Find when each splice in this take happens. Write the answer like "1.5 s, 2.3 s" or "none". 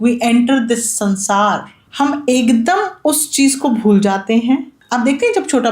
1.8 s, 4.8 s

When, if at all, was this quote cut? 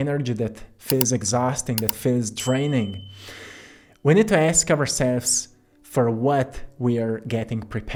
none

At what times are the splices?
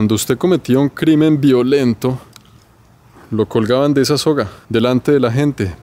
4.6 s

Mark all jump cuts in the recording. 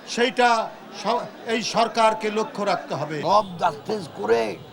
3.1 s

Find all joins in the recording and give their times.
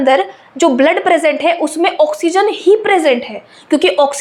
none

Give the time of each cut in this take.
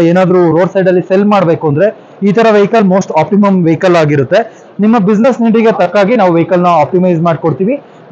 none

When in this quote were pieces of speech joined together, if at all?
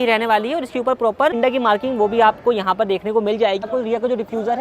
1.4 s, 3.7 s

